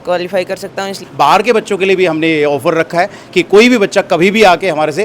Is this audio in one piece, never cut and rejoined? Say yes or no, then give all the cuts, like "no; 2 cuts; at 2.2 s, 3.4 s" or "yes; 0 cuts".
no; 1 cut; at 1.0 s